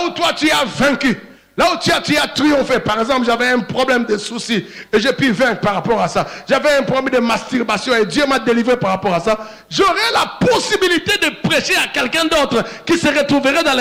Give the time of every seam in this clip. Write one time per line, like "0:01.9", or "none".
none